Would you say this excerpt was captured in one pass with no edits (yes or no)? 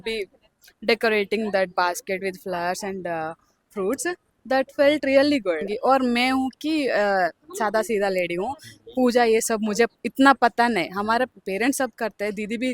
no